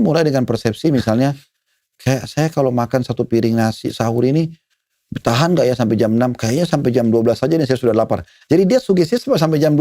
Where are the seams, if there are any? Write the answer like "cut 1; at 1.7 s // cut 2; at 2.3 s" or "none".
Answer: none